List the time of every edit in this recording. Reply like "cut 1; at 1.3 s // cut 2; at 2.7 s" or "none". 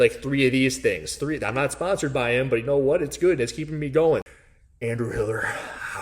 cut 1; at 4.3 s